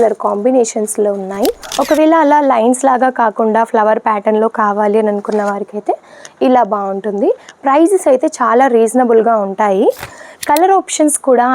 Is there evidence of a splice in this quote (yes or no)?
yes